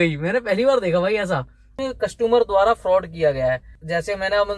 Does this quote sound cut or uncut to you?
cut